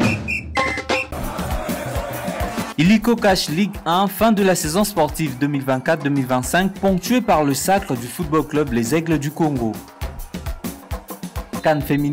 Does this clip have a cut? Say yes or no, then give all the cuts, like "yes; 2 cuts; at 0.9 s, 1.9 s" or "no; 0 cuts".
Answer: yes; 1 cut; at 1.0 s